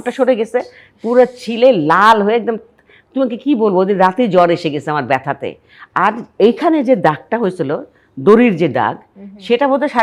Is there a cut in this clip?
no; 0 cuts

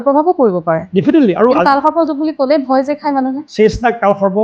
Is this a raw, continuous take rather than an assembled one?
no; 1 cut; at 3.4 s

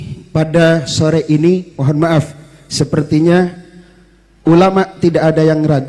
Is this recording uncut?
yes; 0 cuts

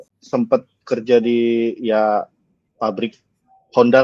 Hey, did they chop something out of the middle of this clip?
no; 0 cuts

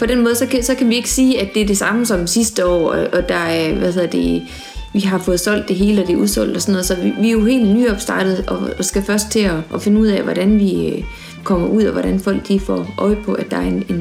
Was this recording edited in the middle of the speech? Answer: yes; 1 cut; at 11.3 s

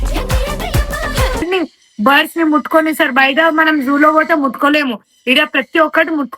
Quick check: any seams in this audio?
yes; 1 cut; at 1.4 s

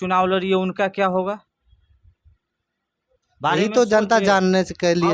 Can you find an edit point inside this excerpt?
no; 0 cuts

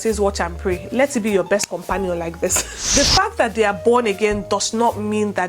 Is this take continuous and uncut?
no; 1 cut; at 2.9 s

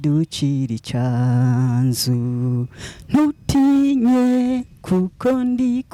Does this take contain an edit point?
no; 0 cuts

